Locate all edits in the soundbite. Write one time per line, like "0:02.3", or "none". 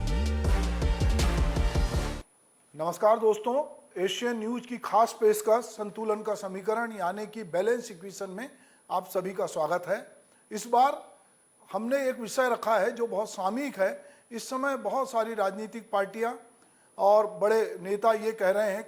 0:02.0